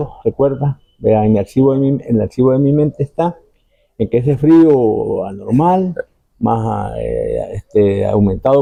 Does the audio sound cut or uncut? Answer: uncut